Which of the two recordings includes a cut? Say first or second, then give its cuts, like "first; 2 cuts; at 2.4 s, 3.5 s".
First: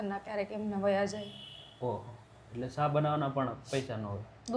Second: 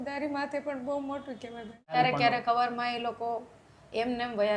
second; 1 cut; at 1.9 s